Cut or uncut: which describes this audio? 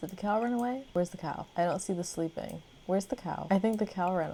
uncut